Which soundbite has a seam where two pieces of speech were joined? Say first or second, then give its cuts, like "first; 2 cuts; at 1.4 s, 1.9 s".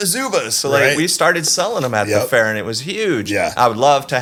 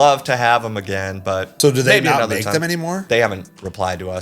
second; 2 cuts; at 1.5 s, 3.0 s